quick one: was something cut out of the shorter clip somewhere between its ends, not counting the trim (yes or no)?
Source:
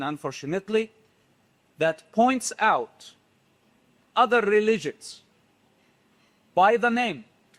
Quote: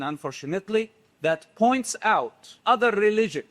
yes